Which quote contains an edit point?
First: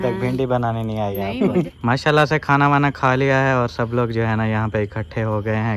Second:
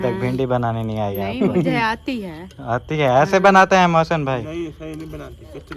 first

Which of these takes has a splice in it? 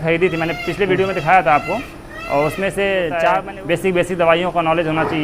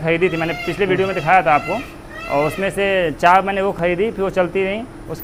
first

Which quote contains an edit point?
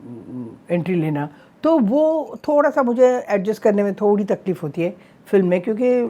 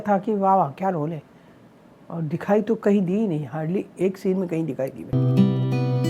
second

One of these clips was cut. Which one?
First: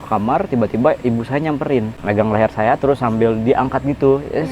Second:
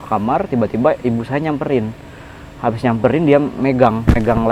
first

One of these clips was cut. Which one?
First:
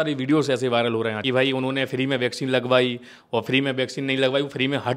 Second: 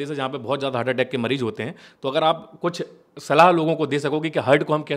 first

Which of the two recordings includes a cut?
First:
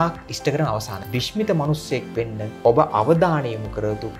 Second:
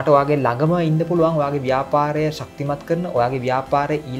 first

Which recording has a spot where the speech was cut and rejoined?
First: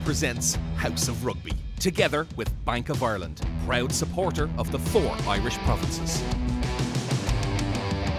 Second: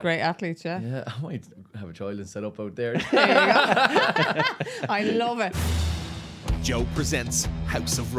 second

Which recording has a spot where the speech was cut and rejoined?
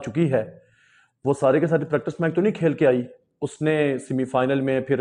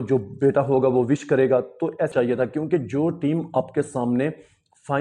second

